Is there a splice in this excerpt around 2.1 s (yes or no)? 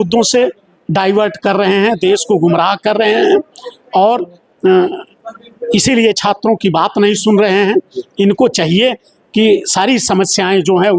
no